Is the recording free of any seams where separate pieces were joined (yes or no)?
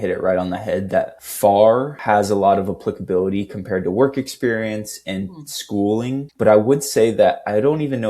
no